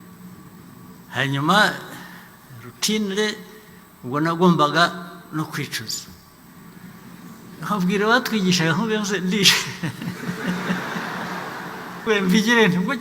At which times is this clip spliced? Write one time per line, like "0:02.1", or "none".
0:12.1